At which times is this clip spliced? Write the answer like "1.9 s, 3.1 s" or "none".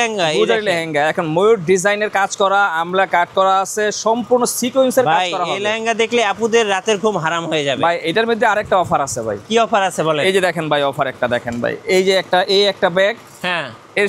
none